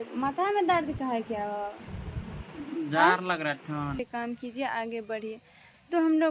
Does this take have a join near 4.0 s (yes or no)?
yes